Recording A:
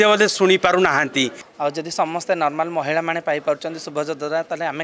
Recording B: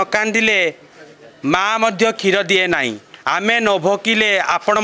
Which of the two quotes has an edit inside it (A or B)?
A